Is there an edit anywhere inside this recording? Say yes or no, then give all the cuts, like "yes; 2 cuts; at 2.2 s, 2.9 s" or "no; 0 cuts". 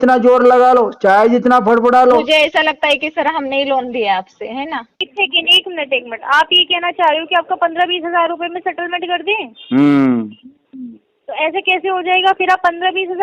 yes; 1 cut; at 5.0 s